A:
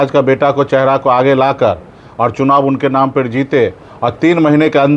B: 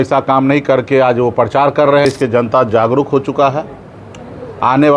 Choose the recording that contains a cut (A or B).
B